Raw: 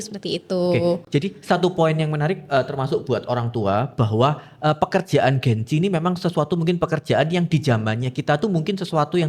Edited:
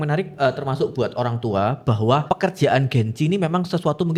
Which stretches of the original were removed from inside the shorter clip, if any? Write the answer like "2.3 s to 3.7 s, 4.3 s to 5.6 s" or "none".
4.4 s to 4.8 s